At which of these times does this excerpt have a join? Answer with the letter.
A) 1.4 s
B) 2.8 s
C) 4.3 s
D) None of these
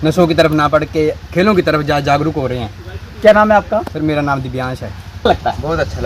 D